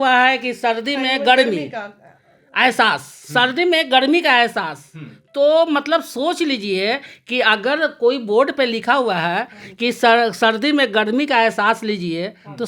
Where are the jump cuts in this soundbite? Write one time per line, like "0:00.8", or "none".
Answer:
none

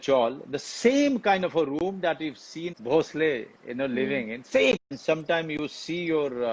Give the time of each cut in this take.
0:02.7
0:04.9

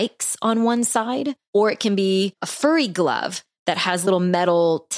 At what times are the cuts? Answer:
0:01.4
0:02.5
0:04.1

